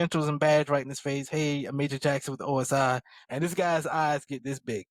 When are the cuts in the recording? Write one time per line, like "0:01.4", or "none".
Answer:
0:03.2